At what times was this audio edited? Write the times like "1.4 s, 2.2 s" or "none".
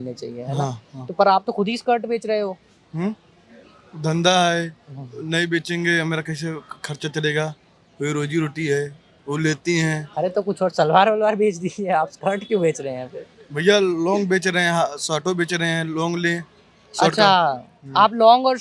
none